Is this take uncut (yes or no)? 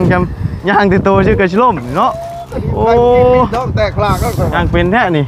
yes